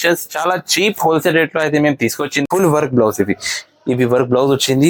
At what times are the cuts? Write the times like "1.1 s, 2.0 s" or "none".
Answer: 2.4 s